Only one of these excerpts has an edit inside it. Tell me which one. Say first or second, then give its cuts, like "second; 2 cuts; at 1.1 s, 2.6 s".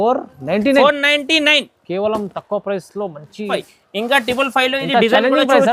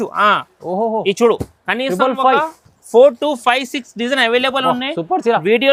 first; 1 cut; at 3.5 s